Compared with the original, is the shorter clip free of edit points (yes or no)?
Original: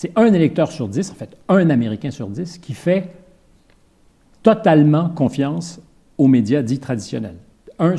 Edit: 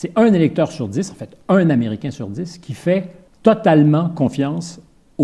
no